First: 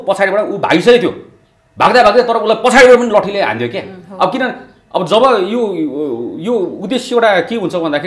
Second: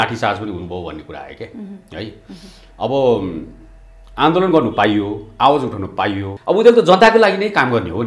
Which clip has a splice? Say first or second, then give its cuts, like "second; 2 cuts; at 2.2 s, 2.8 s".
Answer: second; 1 cut; at 6.3 s